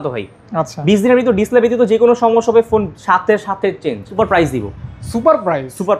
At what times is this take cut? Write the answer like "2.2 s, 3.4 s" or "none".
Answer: 4.1 s